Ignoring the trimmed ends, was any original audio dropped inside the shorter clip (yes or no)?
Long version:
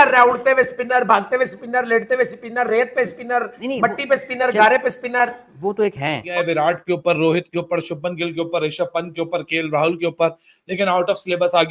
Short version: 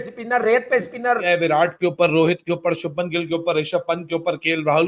yes